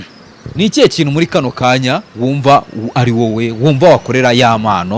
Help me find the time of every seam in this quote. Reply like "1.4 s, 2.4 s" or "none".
none